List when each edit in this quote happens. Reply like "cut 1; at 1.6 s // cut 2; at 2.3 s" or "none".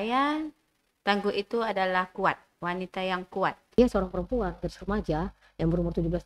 cut 1; at 3.8 s

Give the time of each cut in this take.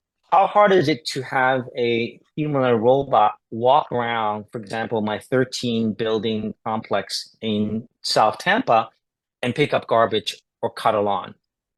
none

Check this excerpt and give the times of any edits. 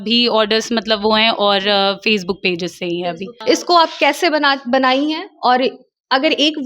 cut 1; at 3.3 s

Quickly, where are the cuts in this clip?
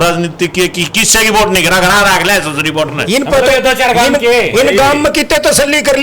cut 1; at 3.0 s

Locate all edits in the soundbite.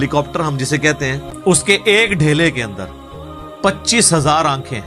cut 1; at 1.3 s

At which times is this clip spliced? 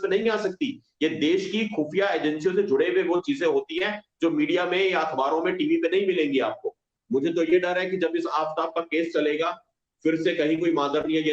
cut 1; at 6.9 s

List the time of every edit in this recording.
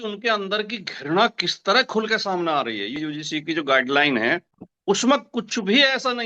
cut 1; at 2.9 s

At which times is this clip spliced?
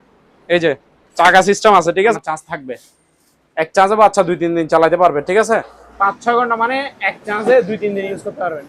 cut 1; at 2.1 s // cut 2; at 5.8 s

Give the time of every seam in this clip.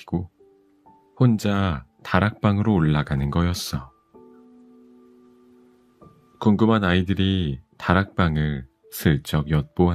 cut 1; at 4.0 s // cut 2; at 5.8 s

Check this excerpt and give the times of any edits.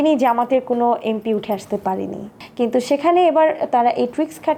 none

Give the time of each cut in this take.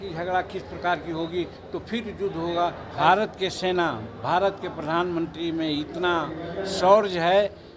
cut 1; at 2.8 s

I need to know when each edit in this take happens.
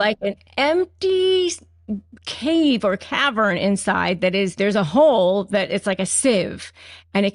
cut 1; at 4.5 s

